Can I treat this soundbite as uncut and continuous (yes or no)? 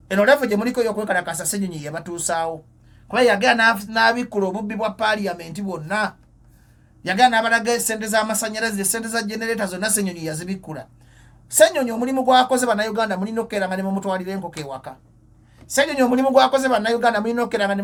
yes